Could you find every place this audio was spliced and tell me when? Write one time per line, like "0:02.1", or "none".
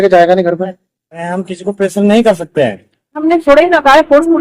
0:01.3
0:03.2